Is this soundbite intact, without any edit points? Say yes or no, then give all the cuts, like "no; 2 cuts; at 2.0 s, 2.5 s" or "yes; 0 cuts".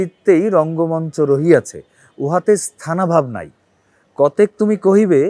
yes; 0 cuts